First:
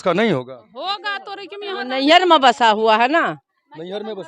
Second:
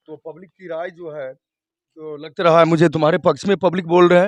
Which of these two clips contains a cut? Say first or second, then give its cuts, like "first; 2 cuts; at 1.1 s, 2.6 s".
first; 1 cut; at 1.7 s